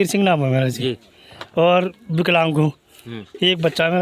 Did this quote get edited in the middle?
no; 0 cuts

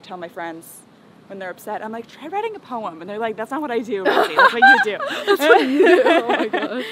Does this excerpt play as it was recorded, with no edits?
yes; 0 cuts

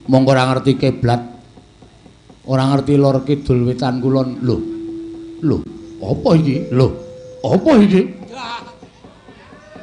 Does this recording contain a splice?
no; 0 cuts

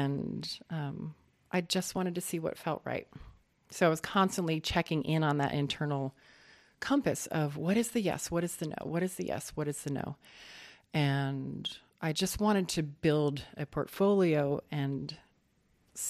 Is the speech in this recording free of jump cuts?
no; 1 cut; at 12.2 s

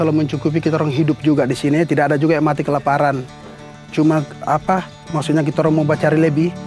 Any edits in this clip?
no; 0 cuts

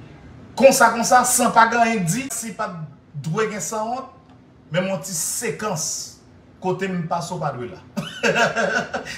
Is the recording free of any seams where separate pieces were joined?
no; 2 cuts; at 1.0 s, 2.3 s

